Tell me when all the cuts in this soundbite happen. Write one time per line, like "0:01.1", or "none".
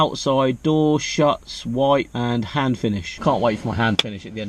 0:03.1